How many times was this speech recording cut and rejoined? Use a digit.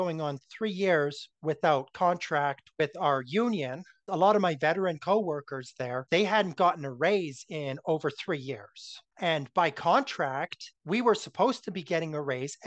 1